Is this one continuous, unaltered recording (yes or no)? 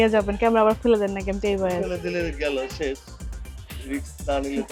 yes